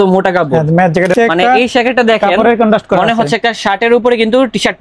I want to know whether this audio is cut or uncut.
cut